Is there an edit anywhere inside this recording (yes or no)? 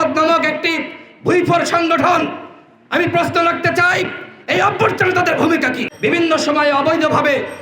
yes